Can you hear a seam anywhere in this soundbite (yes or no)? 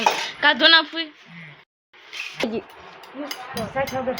yes